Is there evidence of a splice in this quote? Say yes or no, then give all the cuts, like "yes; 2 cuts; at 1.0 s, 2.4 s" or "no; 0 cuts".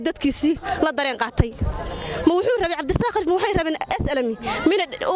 no; 0 cuts